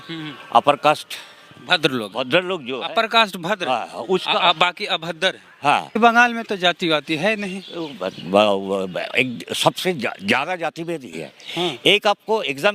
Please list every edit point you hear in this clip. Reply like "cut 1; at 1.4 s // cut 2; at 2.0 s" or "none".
cut 1; at 6.0 s